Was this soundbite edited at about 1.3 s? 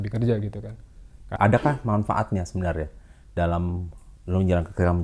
yes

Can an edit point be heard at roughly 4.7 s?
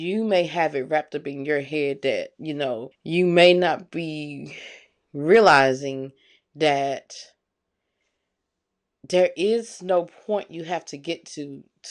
no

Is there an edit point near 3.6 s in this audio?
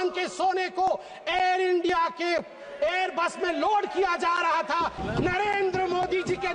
no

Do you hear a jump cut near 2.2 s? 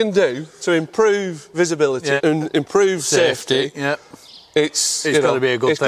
yes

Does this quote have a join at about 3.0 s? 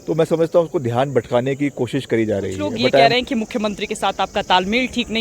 yes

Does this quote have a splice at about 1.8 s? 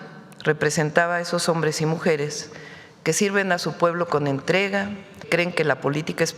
no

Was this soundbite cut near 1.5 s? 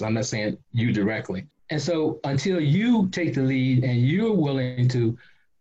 yes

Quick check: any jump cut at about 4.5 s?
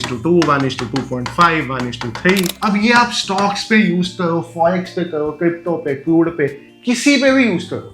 no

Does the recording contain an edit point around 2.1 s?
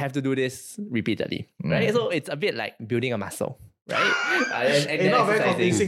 yes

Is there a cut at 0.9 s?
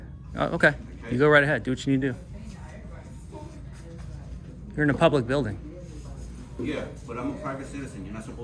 no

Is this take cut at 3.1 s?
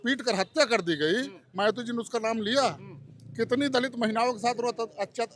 no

